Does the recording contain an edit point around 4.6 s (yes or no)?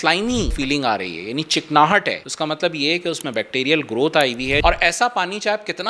yes